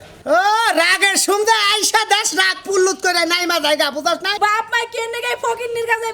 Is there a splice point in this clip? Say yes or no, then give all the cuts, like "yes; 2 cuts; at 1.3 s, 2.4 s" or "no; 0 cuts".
yes; 1 cut; at 4.3 s